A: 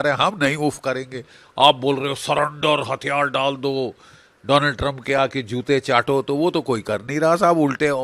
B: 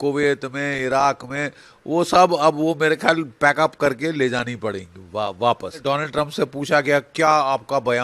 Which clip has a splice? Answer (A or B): B